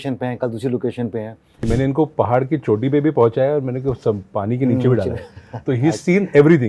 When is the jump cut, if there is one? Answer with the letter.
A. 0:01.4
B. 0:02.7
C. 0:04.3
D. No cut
A